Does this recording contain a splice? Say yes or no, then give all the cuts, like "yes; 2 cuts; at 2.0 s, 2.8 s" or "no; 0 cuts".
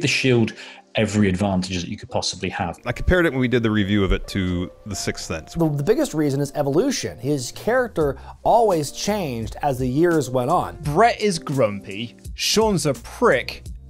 yes; 3 cuts; at 2.7 s, 5.6 s, 10.8 s